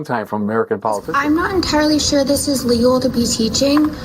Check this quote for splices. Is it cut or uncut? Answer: cut